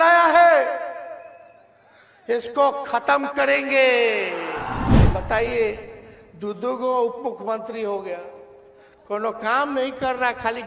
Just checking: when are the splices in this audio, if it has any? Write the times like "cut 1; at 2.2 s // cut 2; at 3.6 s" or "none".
cut 1; at 5.0 s